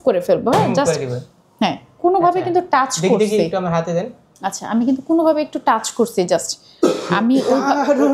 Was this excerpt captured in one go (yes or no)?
yes